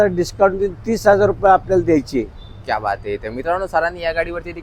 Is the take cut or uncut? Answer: uncut